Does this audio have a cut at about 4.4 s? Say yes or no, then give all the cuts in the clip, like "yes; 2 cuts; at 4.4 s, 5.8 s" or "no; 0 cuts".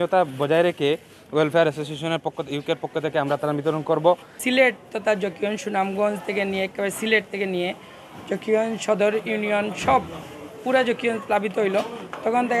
yes; 1 cut; at 4.4 s